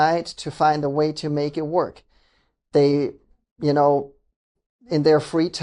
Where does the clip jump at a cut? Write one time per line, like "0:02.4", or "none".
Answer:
none